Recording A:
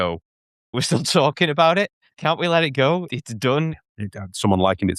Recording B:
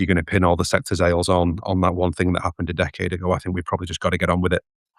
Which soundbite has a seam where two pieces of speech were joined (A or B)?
A